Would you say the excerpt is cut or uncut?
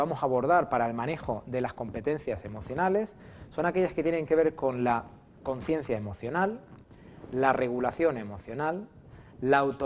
cut